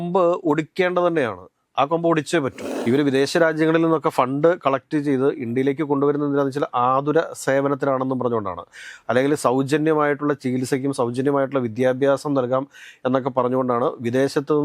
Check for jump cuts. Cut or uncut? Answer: cut